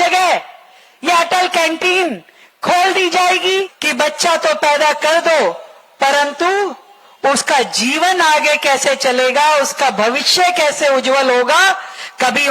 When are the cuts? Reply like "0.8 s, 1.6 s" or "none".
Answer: 3.8 s